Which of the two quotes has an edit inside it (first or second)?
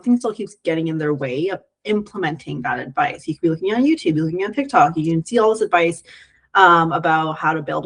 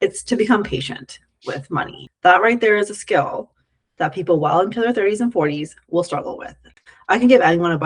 second